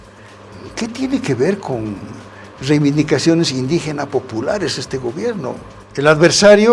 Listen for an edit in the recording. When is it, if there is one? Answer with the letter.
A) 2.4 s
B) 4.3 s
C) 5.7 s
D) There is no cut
C